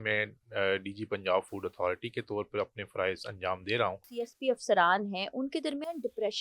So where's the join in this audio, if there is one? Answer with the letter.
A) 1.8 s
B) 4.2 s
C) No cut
B